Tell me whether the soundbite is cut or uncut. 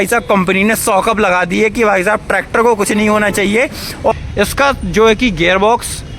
cut